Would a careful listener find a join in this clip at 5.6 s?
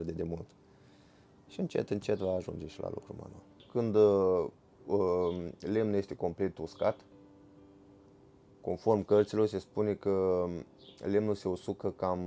no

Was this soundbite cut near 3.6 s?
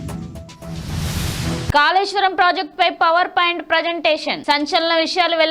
no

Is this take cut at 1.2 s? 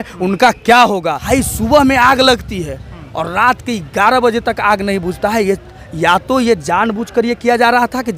yes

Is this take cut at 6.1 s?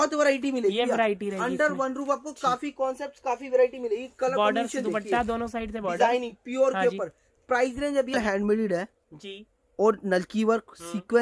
no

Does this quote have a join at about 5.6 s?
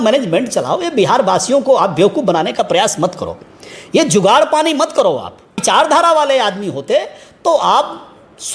yes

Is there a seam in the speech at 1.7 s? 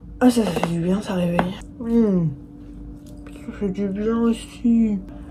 yes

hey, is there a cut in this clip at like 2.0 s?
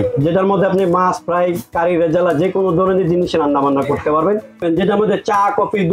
no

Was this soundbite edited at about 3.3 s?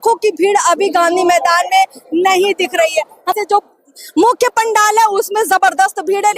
yes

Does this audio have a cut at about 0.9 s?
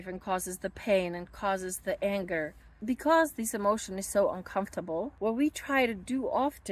no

